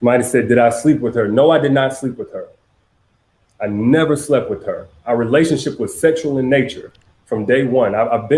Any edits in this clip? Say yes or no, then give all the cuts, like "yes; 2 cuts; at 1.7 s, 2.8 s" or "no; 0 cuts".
no; 0 cuts